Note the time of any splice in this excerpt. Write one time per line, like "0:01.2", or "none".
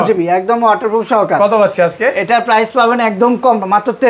none